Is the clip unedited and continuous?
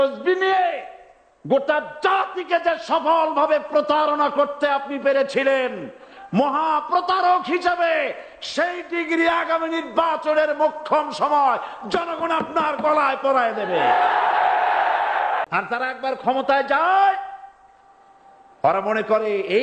no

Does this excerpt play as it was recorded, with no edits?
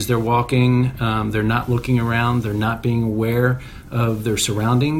yes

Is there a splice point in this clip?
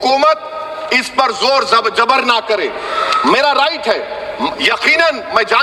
no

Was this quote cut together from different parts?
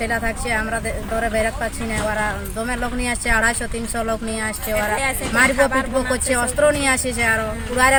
no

